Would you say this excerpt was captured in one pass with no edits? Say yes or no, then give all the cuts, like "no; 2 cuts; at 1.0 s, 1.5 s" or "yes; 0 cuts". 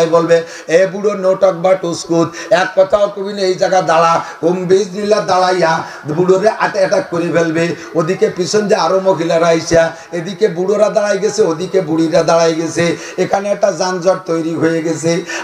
yes; 0 cuts